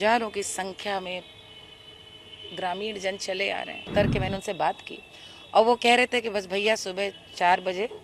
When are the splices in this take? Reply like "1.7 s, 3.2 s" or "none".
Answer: 3.9 s